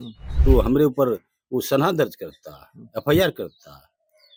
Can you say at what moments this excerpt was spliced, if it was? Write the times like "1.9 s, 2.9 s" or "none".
none